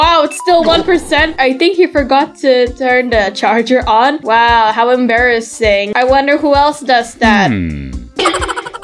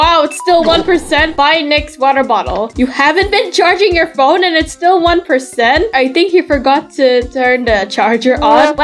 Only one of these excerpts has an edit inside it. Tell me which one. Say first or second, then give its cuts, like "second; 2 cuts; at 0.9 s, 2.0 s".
first; 2 cuts; at 1.3 s, 4.1 s